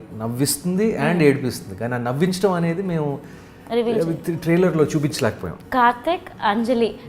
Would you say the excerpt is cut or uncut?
cut